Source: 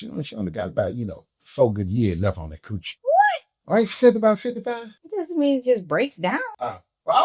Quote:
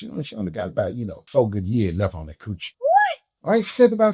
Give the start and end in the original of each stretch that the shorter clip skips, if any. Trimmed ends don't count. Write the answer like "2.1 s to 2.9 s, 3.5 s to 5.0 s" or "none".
1.2 s to 1.4 s